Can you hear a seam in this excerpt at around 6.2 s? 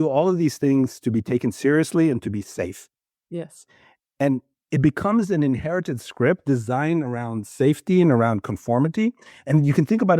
no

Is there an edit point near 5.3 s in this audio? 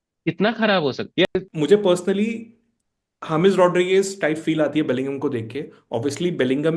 no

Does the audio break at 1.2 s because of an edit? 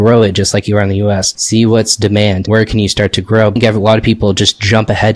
no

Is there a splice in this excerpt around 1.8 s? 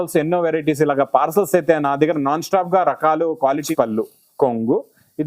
no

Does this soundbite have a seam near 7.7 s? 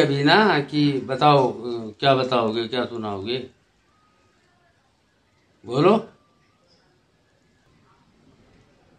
yes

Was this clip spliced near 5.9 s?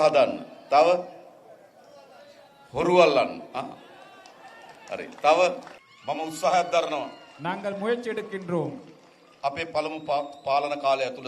yes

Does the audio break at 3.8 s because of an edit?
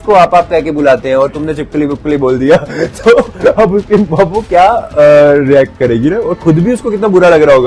no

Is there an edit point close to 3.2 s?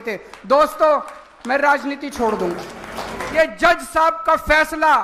yes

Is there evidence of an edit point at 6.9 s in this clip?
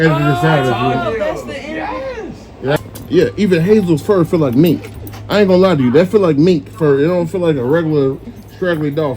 no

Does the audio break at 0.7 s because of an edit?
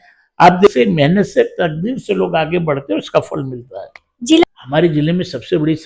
yes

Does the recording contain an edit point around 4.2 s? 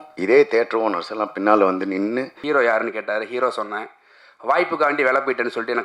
no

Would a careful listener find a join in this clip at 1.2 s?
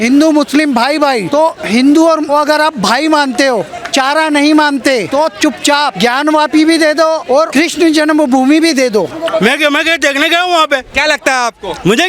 yes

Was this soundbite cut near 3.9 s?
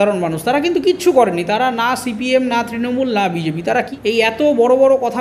yes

